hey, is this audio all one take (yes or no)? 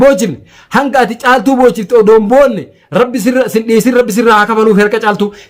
yes